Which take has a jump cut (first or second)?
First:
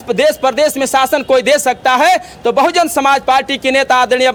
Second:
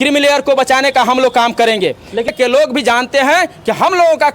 second